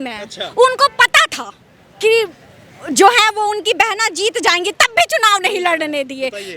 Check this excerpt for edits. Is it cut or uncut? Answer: uncut